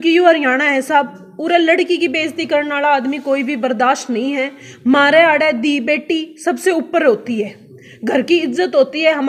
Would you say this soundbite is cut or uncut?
uncut